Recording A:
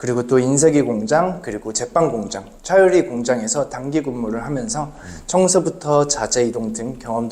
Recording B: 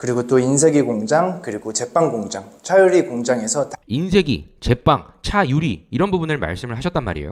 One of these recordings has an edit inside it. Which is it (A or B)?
A